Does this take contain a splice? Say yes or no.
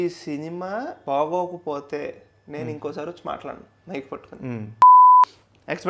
yes